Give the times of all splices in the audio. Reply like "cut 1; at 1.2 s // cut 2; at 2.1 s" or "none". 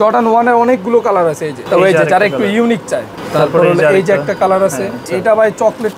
cut 1; at 1.5 s // cut 2; at 3.2 s // cut 3; at 5.0 s